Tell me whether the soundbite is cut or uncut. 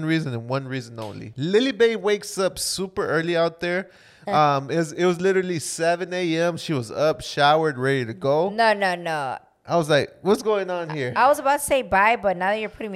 uncut